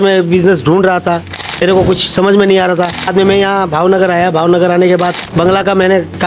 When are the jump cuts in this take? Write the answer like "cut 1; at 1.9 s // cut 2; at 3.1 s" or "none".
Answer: cut 1; at 1.6 s // cut 2; at 3.1 s // cut 3; at 5.2 s